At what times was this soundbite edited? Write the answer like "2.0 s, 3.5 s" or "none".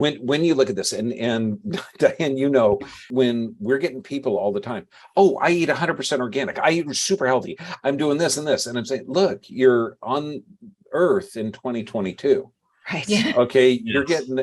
3.1 s

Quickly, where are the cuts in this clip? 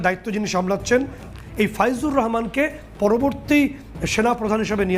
1.3 s

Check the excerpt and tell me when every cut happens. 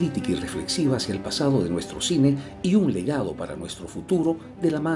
none

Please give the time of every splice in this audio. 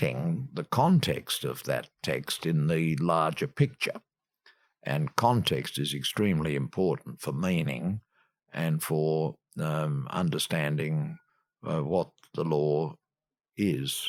none

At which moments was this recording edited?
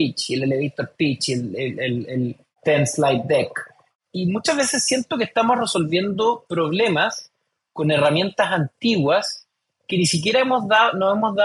none

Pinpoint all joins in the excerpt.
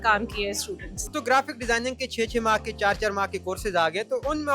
1.1 s

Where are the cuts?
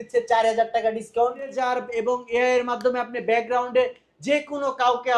1.6 s

